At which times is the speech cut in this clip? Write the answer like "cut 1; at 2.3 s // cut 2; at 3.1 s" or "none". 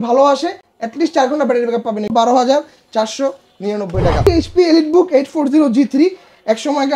cut 1; at 2.1 s // cut 2; at 4.2 s